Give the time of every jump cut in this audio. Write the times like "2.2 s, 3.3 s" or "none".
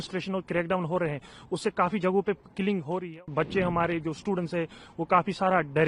3.3 s